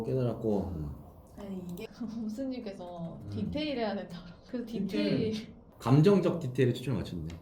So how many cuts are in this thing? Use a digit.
0